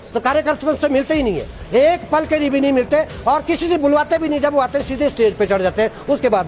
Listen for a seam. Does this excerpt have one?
no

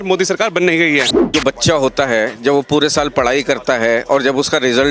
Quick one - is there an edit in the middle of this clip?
yes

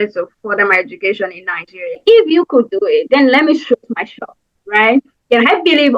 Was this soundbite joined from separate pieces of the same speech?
yes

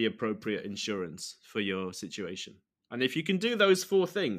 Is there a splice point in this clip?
no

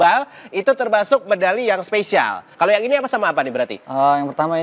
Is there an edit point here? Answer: yes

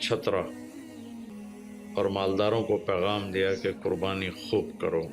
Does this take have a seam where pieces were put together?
yes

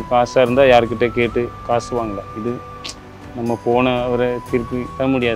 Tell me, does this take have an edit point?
no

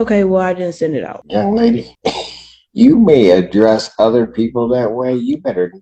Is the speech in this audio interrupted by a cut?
yes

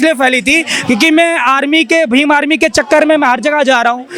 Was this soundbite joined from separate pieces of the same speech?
no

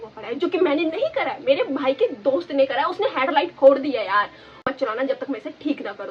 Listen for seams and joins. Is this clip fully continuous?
no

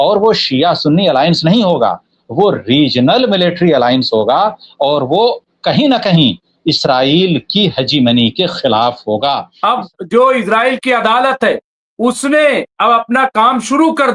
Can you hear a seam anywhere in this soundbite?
yes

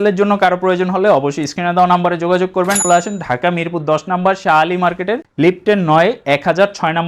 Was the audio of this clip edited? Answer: yes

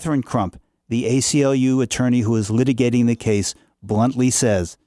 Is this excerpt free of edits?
yes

